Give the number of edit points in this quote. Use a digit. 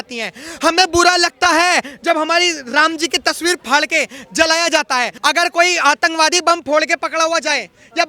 1